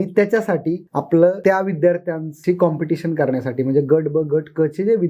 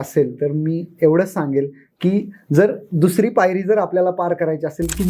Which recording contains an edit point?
first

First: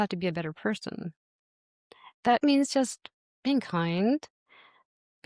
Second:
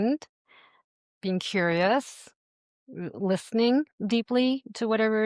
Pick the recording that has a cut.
first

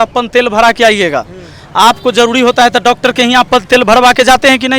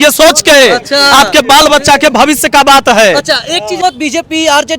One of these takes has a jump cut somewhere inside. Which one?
second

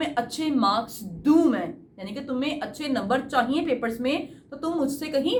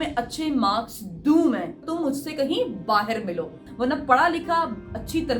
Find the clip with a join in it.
second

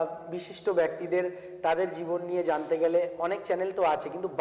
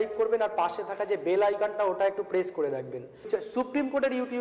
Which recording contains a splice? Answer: second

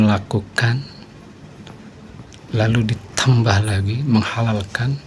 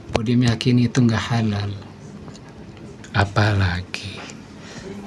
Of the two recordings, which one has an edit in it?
second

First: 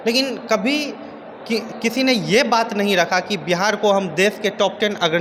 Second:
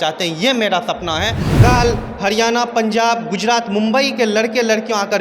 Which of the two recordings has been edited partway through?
second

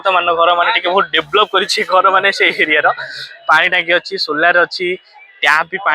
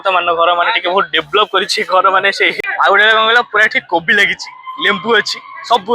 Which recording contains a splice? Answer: second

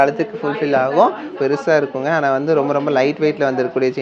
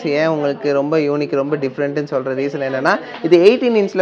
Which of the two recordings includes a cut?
first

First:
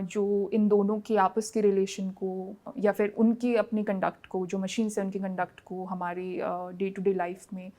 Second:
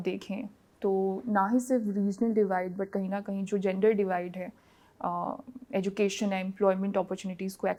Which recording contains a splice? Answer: first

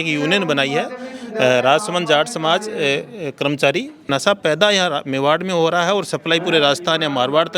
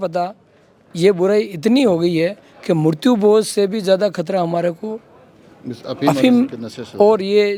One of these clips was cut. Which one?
first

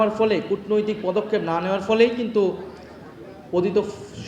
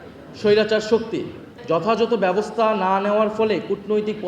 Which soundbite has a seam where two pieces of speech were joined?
second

